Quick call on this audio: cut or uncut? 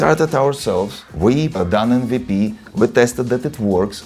cut